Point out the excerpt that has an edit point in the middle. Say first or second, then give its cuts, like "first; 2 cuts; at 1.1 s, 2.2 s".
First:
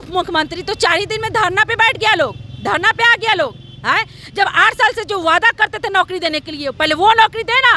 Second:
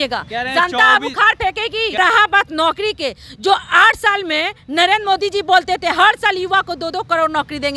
second; 1 cut; at 2.0 s